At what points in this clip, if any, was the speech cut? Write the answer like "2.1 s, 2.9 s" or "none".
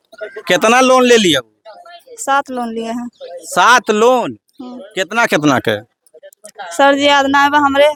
none